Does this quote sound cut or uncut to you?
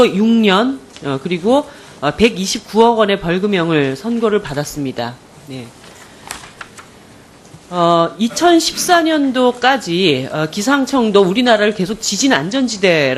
uncut